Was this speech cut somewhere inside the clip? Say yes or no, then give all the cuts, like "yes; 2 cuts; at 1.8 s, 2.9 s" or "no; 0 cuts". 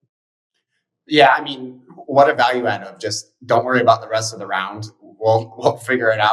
no; 0 cuts